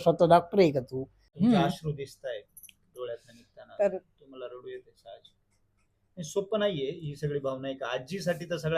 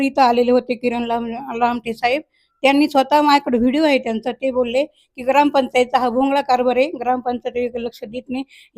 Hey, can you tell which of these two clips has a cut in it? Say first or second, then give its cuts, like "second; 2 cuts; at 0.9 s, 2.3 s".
first; 1 cut; at 1.2 s